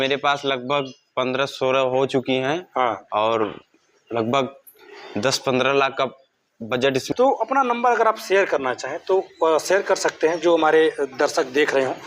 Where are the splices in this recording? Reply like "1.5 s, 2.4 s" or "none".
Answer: 7.1 s